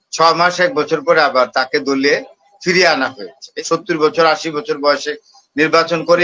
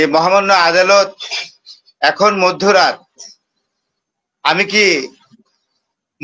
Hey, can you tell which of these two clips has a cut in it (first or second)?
first